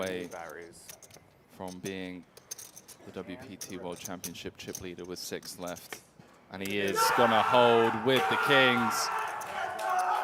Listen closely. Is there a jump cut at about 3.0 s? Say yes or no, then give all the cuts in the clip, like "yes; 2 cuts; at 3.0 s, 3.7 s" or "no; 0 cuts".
no; 0 cuts